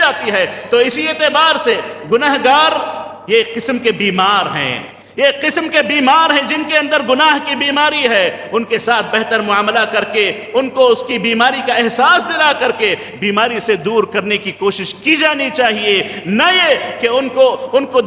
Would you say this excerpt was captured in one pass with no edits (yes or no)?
yes